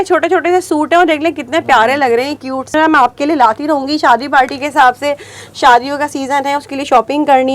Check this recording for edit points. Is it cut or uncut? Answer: cut